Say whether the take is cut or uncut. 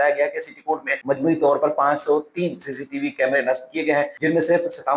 cut